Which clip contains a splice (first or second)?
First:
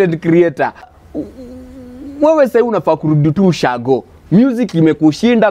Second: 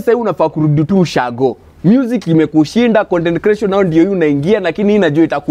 first